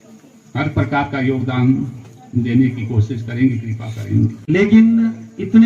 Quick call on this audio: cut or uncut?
cut